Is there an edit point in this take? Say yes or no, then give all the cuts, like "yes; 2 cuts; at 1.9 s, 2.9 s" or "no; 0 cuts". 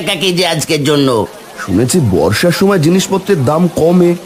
yes; 1 cut; at 1.4 s